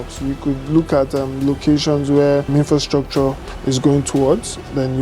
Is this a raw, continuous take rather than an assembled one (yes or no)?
no